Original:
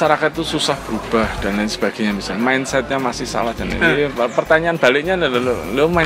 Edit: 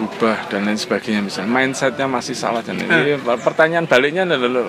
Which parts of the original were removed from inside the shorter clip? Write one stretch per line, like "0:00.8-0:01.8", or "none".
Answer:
none